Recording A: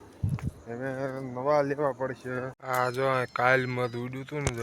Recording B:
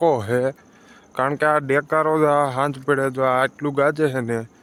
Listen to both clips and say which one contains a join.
A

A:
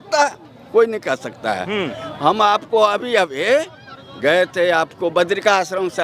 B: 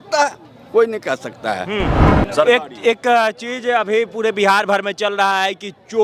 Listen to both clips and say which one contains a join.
B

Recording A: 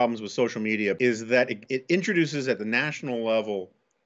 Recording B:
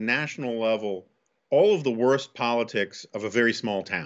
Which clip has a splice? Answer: A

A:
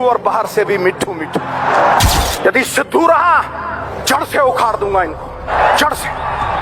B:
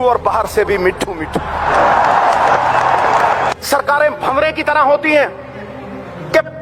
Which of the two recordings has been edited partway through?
A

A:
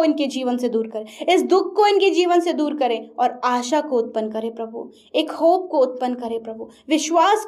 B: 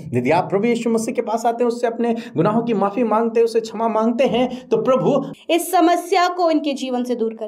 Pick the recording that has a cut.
B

